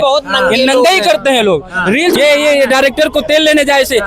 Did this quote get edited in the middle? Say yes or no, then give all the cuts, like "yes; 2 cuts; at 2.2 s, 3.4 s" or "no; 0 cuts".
yes; 1 cut; at 2.1 s